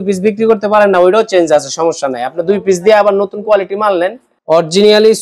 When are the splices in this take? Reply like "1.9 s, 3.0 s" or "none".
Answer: 4.3 s